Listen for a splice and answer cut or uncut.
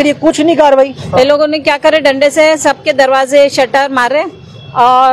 cut